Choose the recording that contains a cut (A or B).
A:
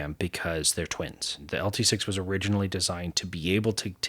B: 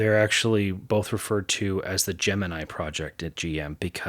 A